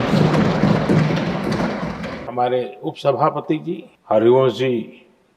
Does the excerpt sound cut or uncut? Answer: cut